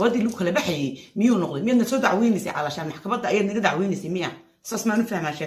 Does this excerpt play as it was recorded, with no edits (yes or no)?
no